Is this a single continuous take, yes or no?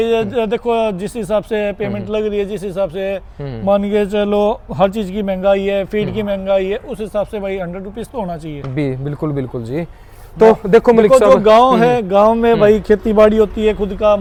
yes